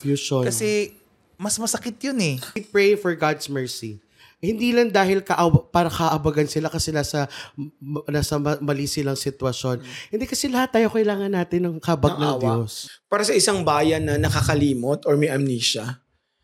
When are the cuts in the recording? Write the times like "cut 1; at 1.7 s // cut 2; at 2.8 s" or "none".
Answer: cut 1; at 2.6 s // cut 2; at 12.8 s